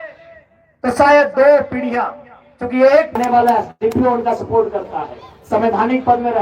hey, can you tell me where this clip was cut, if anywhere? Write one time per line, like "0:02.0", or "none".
0:03.2